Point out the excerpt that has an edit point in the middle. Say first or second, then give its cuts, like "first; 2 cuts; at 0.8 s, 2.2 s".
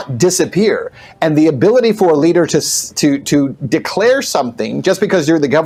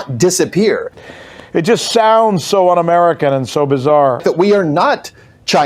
second; 2 cuts; at 1.0 s, 4.2 s